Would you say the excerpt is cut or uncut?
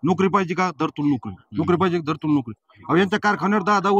uncut